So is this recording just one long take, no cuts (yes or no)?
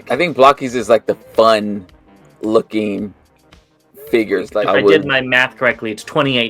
no